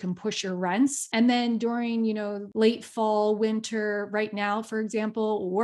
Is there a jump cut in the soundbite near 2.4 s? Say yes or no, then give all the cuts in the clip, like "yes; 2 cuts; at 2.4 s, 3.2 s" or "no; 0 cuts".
yes; 2 cuts; at 1.0 s, 2.4 s